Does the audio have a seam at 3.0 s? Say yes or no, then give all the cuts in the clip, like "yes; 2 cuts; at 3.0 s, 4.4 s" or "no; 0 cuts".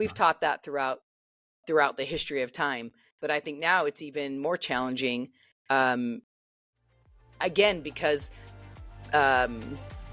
no; 0 cuts